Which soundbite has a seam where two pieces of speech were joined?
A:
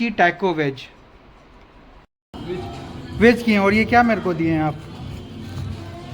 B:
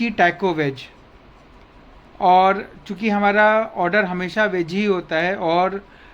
A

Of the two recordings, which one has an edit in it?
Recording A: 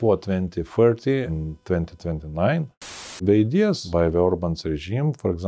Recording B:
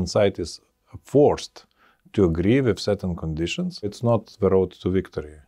A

